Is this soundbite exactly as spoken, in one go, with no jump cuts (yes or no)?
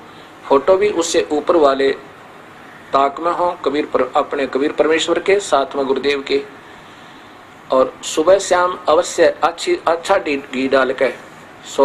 yes